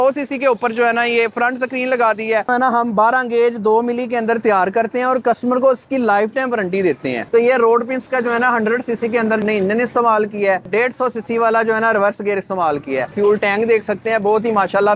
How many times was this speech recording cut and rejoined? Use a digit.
4